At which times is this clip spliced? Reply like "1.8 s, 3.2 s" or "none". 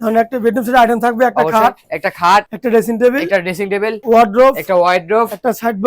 2.5 s, 4.0 s